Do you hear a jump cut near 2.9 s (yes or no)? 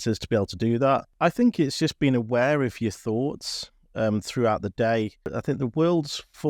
no